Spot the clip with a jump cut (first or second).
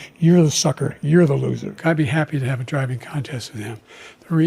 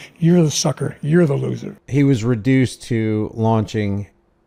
first